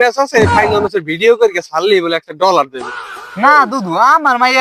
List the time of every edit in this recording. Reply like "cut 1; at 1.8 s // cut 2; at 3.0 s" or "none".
cut 1; at 2.7 s